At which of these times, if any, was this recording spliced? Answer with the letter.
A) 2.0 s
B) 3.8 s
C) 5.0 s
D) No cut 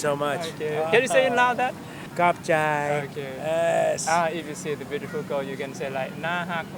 A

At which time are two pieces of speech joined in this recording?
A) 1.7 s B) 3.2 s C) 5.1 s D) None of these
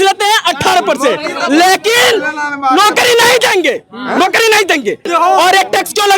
C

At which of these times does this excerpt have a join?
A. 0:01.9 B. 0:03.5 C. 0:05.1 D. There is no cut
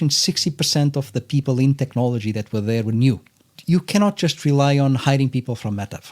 B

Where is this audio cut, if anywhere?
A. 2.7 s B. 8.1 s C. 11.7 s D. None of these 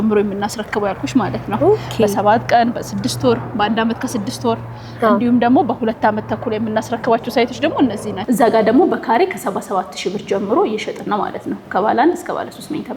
B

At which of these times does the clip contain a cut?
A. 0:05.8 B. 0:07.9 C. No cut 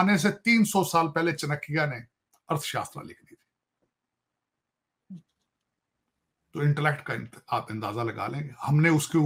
C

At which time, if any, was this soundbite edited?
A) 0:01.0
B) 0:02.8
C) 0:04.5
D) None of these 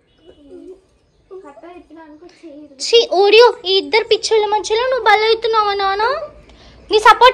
D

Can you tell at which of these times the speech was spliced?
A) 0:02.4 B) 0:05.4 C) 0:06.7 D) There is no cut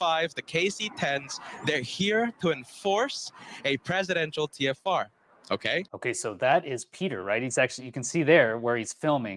D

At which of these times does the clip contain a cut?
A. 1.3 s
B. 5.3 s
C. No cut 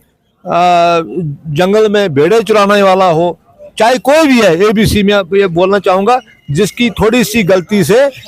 C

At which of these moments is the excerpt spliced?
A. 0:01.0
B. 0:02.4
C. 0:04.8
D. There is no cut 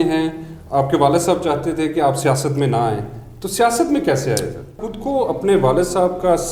C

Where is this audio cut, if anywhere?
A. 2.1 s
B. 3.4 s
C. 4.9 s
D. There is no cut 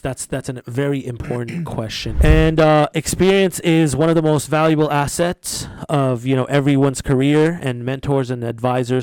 A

